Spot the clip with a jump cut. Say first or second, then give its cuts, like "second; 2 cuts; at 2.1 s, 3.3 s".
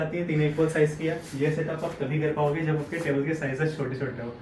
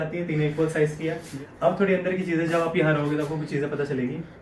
second; 1 cut; at 1.3 s